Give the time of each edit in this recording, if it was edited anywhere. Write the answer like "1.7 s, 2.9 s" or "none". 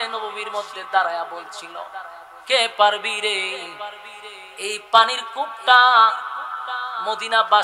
none

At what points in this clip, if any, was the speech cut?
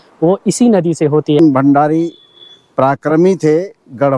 1.4 s

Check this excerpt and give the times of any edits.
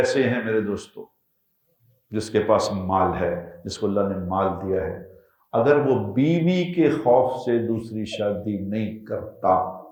none

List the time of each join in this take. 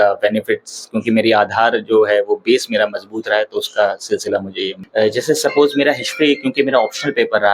4.8 s

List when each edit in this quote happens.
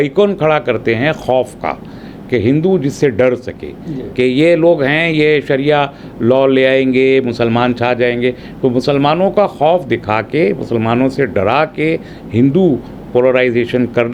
none

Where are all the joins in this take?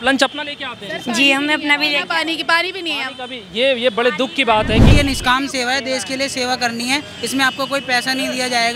4.9 s

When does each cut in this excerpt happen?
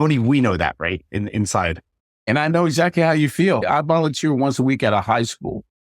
2.3 s, 3.6 s

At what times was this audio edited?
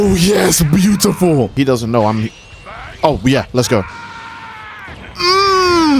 1.5 s

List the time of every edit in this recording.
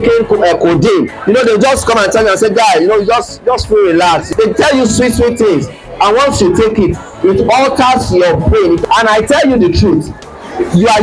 1.1 s, 4.3 s, 8.8 s

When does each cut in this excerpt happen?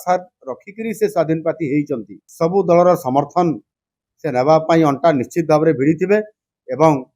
2.2 s

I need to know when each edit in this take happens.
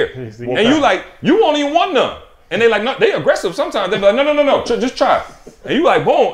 none

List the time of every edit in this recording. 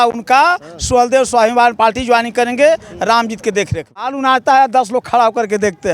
4.1 s

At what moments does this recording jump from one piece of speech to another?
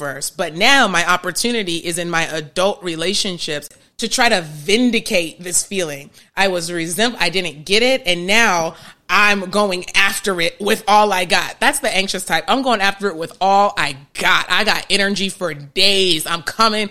3.8 s

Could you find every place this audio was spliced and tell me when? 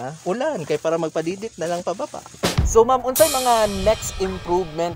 2.2 s

